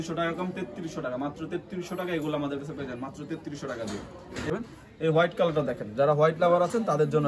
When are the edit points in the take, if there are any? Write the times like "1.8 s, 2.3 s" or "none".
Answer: 4.5 s